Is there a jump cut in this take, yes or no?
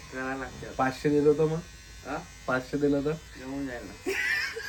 no